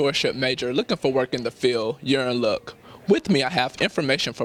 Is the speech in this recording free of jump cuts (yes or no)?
yes